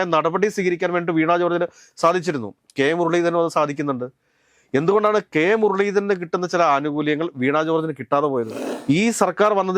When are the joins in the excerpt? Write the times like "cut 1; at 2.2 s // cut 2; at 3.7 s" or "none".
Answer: cut 1; at 8.6 s